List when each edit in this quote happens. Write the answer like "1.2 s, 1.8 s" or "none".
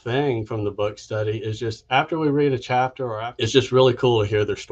3.1 s